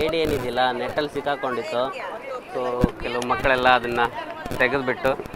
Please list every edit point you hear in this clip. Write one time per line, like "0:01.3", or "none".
none